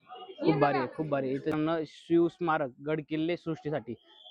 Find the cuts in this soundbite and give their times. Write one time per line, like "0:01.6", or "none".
0:01.7

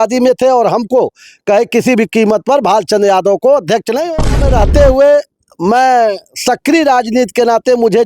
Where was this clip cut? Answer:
0:04.1

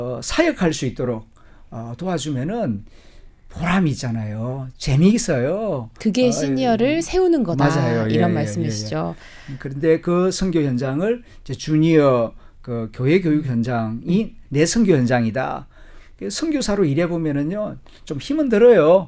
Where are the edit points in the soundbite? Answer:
none

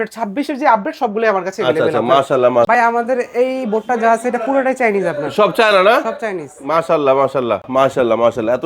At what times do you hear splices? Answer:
0:02.7
0:07.7

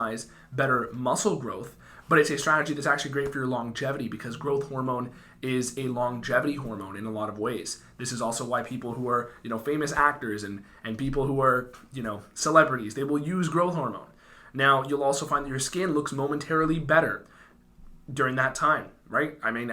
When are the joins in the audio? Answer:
none

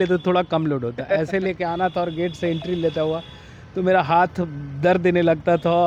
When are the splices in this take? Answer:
none

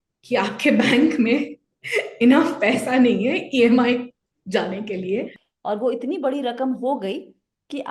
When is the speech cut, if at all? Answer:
0:05.3

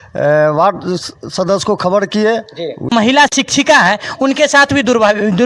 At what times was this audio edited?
0:02.9

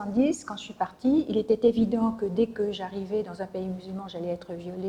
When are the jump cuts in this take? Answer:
none

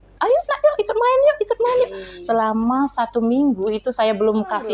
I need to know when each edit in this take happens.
0:03.8

